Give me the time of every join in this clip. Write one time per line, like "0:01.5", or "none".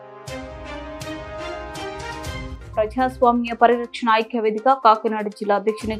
none